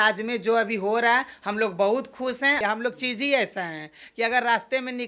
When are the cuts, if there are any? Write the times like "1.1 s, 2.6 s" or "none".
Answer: 2.6 s